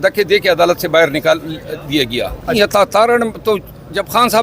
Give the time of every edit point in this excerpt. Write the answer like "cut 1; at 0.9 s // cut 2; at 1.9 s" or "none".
cut 1; at 2.5 s